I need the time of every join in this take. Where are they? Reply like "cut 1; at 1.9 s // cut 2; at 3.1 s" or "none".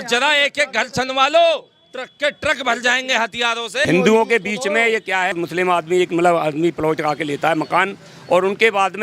cut 1; at 3.8 s // cut 2; at 5.3 s